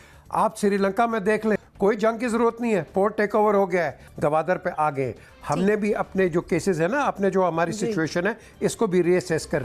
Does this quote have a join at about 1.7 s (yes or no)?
yes